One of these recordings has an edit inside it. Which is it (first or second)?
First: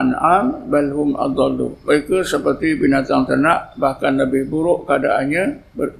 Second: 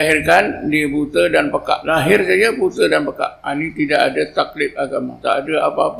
second